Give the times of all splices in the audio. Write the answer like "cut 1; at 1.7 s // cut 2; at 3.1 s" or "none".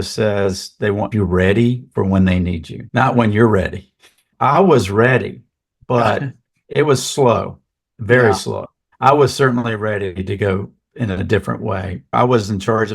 cut 1; at 1.1 s // cut 2; at 6.6 s